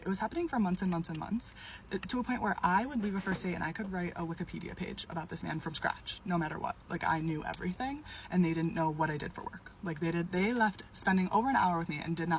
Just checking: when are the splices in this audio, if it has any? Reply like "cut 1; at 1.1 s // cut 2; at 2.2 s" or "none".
cut 1; at 7.4 s